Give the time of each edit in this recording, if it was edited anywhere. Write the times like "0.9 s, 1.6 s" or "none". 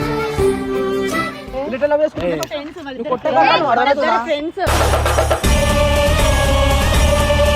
1.4 s